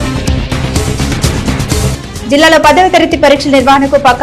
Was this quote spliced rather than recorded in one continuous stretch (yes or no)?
yes